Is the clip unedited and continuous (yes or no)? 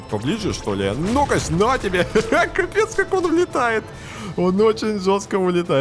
yes